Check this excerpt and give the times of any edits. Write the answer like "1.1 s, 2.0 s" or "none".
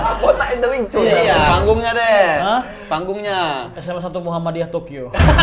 1.5 s